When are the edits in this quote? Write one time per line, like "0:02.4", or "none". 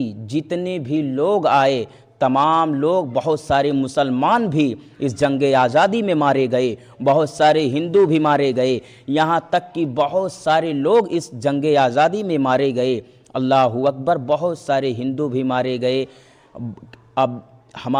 none